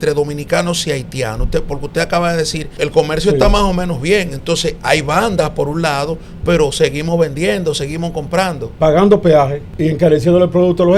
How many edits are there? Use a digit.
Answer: 2